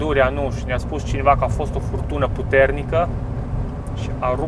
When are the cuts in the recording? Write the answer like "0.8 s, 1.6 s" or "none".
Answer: none